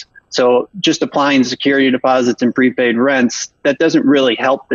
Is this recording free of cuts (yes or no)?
yes